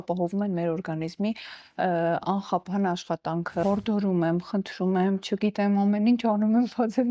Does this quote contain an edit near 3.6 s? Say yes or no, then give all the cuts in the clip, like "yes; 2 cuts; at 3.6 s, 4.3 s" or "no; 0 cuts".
yes; 1 cut; at 3.6 s